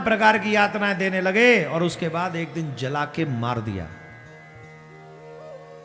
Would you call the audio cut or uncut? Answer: uncut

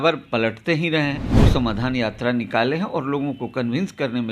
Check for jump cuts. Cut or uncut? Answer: cut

